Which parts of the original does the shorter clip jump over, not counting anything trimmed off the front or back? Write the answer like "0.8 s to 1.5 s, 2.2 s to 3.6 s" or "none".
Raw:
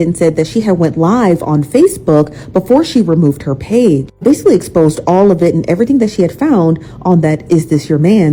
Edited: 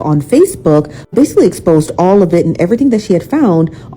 2.4 s to 4.1 s